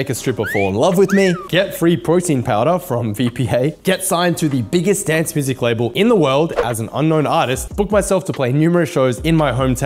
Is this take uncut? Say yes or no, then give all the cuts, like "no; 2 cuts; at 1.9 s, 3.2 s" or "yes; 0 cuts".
no; 4 cuts; at 1.5 s, 3.7 s, 5.9 s, 7.6 s